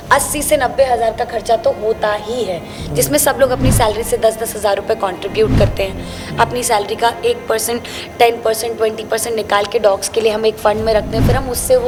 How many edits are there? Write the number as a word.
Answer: zero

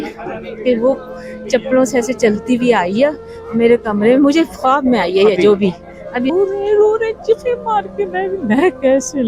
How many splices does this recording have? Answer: one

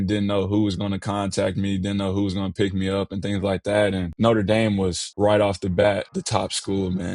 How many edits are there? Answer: three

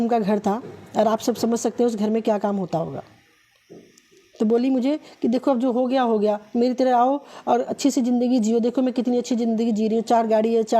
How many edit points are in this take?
zero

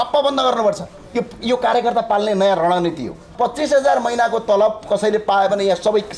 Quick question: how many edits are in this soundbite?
one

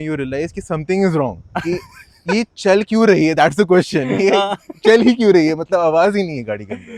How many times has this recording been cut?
zero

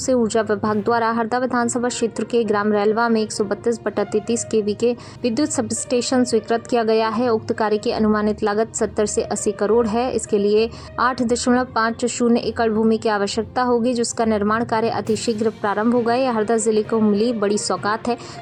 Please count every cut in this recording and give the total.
zero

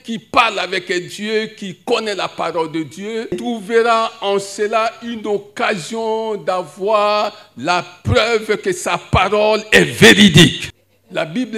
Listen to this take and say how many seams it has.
two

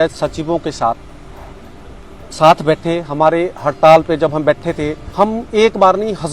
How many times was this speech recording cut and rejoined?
one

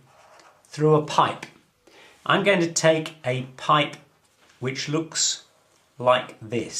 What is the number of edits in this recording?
one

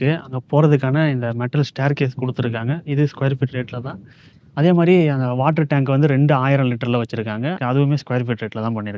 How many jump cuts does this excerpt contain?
one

